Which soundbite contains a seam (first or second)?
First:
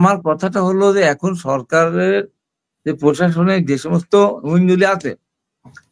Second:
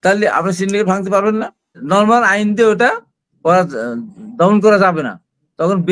second